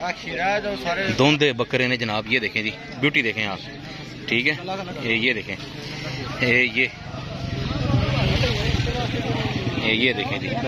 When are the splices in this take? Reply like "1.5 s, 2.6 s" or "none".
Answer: 1.0 s